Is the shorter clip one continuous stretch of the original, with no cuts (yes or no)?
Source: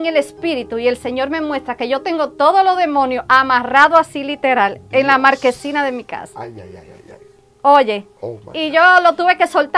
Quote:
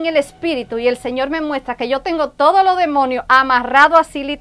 yes